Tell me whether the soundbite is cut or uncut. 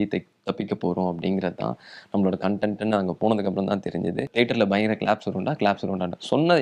cut